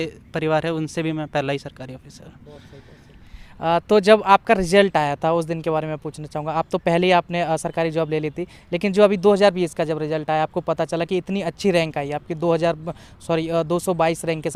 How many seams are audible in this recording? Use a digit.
0